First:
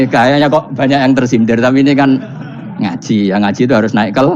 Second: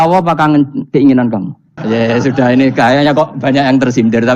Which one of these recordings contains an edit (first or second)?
second